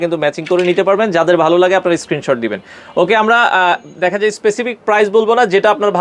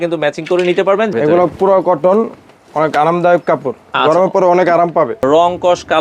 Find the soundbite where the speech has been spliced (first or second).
second